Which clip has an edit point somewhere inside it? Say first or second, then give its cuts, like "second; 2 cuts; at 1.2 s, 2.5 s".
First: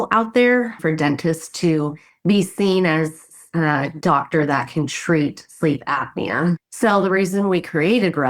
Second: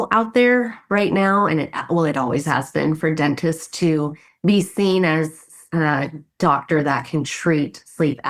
first; 3 cuts; at 0.8 s, 3.6 s, 6.6 s